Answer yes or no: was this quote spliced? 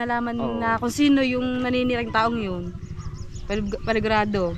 no